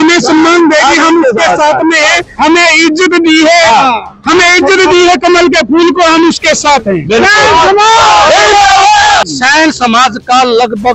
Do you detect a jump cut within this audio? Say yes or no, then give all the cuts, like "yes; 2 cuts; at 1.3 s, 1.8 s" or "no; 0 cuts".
yes; 1 cut; at 9.2 s